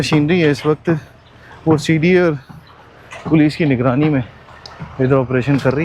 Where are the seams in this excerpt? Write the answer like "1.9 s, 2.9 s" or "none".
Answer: none